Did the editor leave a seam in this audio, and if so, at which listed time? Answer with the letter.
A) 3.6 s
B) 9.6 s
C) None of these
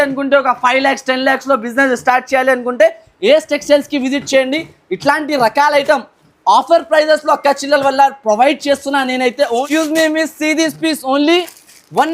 B